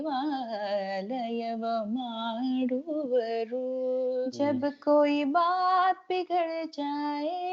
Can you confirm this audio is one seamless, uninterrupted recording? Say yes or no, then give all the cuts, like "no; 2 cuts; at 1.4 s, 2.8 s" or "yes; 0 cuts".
no; 1 cut; at 4.3 s